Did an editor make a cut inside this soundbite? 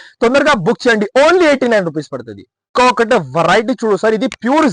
no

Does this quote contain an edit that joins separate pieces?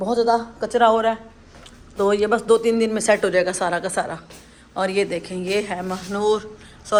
no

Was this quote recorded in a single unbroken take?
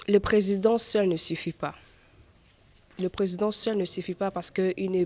yes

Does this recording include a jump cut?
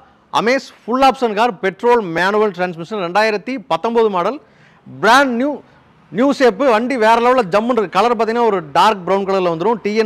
no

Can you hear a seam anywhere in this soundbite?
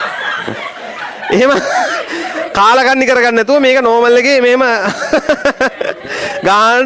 no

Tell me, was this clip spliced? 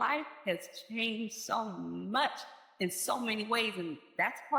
no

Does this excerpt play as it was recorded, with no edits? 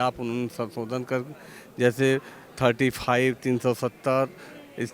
yes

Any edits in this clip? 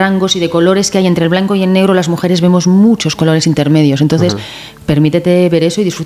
no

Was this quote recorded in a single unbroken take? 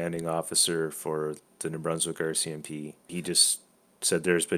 no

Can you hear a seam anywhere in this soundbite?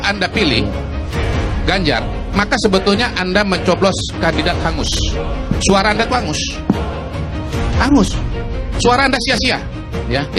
no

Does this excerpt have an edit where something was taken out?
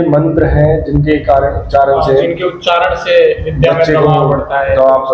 no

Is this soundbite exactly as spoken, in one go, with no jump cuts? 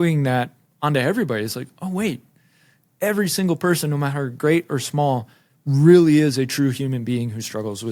yes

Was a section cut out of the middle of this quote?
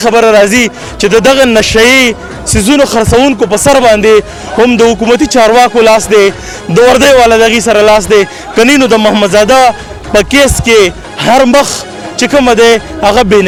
no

